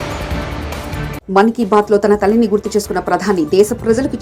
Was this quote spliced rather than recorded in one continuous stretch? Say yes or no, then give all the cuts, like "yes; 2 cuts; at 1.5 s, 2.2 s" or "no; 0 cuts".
no; 0 cuts